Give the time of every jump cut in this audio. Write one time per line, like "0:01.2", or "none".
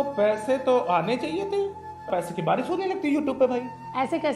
0:02.1